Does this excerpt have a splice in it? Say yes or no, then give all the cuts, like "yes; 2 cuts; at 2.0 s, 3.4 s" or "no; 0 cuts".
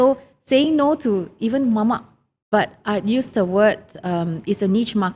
yes; 1 cut; at 2.3 s